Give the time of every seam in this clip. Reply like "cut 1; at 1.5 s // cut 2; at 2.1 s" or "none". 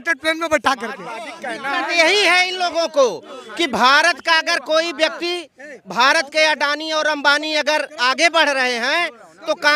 none